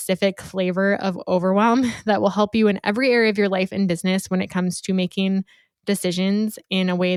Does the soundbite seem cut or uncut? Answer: uncut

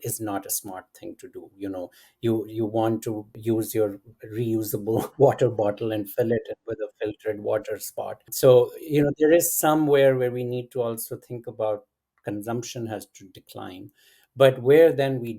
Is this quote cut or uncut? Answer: cut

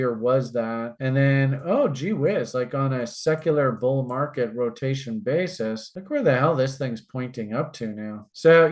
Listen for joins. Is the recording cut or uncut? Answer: uncut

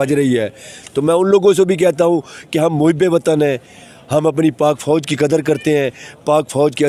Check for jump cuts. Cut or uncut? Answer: uncut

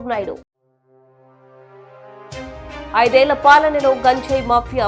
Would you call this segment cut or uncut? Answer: uncut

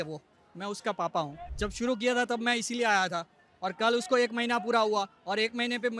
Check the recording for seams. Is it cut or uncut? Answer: cut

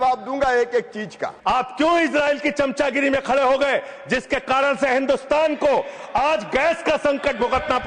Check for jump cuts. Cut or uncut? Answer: cut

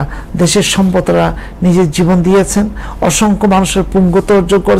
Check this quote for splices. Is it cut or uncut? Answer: uncut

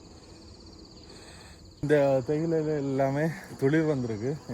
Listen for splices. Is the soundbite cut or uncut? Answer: cut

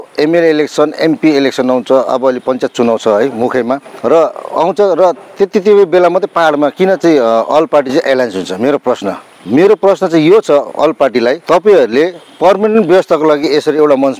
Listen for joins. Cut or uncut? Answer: cut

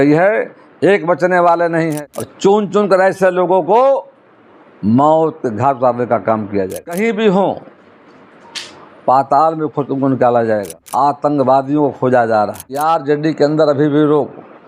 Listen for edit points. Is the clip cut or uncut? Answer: cut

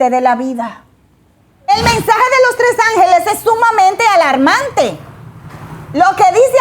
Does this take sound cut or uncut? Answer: cut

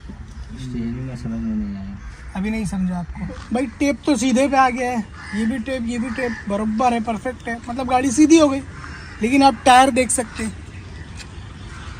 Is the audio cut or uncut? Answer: cut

